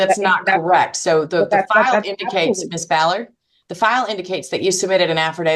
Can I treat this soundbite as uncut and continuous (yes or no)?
yes